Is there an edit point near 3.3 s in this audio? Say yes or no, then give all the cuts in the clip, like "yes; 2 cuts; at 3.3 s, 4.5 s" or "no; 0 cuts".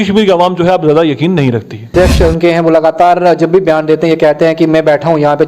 no; 1 cut; at 1.9 s